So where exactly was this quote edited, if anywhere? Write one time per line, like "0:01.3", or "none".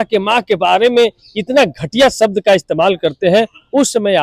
none